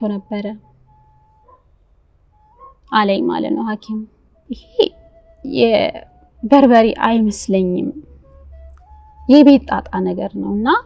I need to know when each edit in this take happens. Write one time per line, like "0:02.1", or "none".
0:04.6